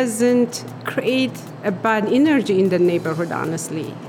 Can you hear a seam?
yes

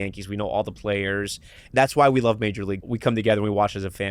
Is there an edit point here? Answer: yes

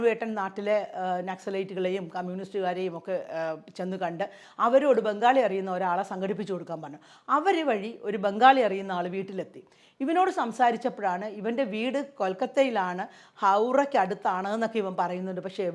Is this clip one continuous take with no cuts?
yes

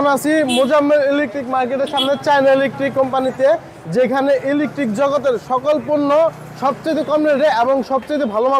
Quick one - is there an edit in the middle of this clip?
no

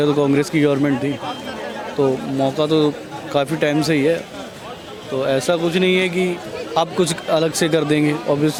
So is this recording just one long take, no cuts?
yes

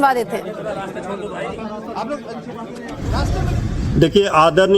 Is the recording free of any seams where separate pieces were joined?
no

